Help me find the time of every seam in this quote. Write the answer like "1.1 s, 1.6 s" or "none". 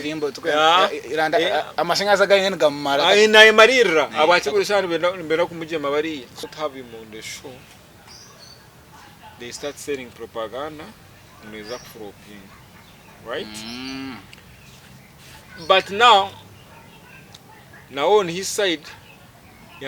6.4 s